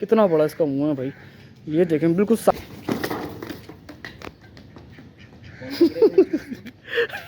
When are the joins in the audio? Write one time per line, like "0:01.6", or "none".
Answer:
0:02.5

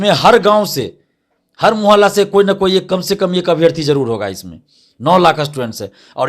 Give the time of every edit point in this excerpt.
none

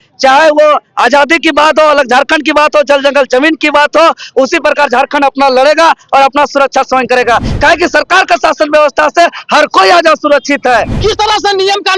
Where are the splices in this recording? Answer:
0:10.9

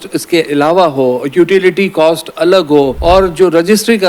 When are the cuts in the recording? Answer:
0:03.0

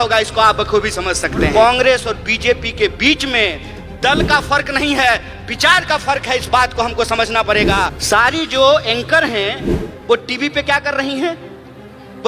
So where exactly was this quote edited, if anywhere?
0:01.5
0:08.0

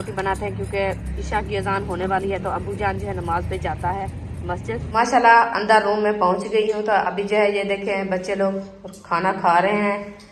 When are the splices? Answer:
0:01.1
0:04.9

